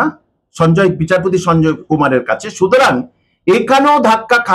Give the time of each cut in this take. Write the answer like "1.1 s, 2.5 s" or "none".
none

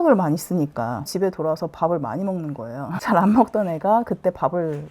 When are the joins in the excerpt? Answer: 1.1 s, 3.0 s

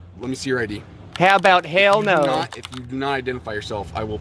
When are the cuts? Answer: none

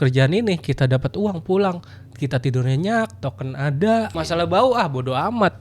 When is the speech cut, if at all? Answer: 4.1 s

